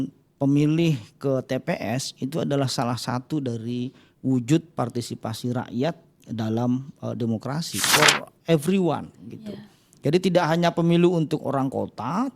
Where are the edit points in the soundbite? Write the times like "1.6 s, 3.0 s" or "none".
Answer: 7.7 s